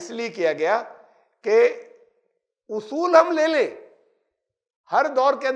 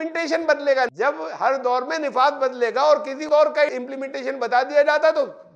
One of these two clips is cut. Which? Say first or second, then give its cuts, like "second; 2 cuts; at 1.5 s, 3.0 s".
second; 2 cuts; at 0.9 s, 3.2 s